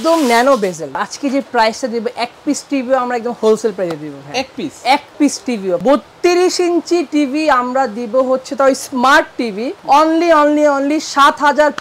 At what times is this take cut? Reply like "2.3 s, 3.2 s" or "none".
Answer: 1.0 s, 5.8 s